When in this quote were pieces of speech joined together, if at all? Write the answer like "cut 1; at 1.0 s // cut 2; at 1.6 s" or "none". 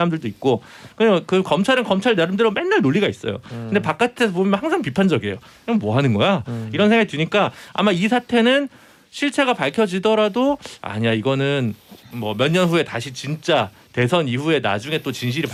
none